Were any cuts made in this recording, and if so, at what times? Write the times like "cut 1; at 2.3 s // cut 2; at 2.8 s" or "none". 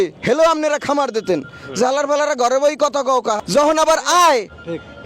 cut 1; at 3.4 s